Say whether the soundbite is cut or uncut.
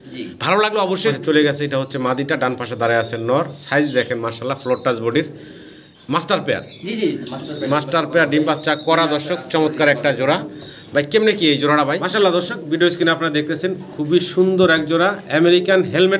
cut